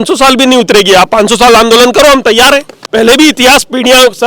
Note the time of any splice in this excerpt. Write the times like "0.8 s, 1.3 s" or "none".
2.8 s

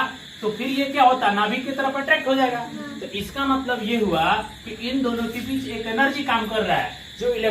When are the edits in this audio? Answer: none

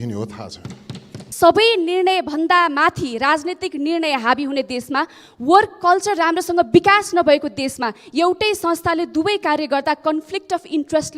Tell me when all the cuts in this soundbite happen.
1.2 s

